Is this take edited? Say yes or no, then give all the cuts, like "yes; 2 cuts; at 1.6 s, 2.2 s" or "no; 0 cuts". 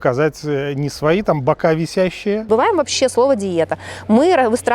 yes; 1 cut; at 2.5 s